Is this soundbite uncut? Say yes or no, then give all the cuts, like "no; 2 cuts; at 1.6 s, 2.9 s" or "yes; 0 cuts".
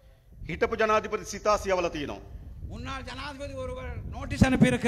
yes; 0 cuts